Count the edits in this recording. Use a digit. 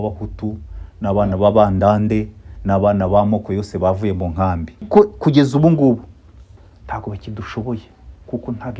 1